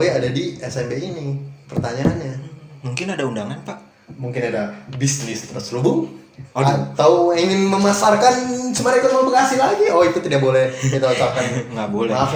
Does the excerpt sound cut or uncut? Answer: uncut